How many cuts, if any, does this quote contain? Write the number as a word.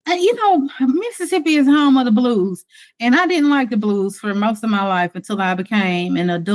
zero